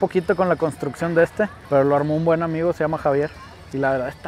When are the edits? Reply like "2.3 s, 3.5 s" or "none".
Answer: 1.6 s